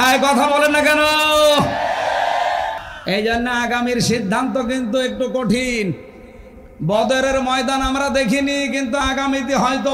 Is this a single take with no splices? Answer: no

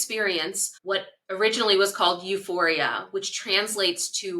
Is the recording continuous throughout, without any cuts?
no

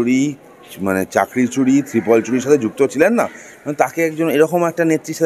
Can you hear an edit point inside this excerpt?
no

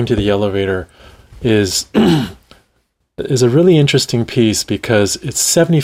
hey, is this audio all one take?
yes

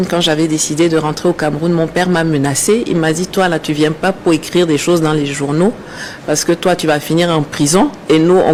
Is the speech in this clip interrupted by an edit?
no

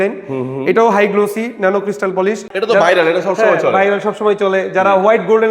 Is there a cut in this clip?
yes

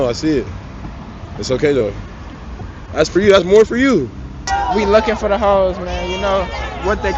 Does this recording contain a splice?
yes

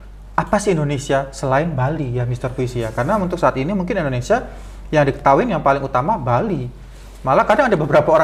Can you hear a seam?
no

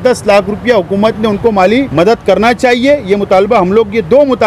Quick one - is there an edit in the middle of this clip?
yes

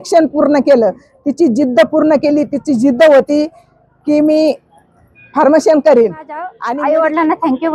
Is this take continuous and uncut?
no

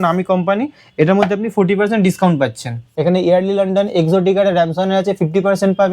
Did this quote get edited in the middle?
yes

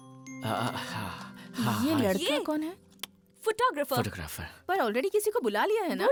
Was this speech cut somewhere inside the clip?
no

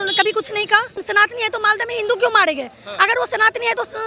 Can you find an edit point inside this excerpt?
yes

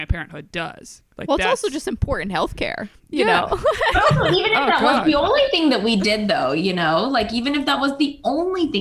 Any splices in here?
no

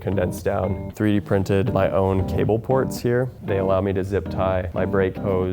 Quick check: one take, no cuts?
no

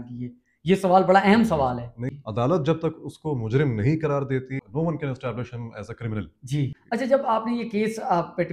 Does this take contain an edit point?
yes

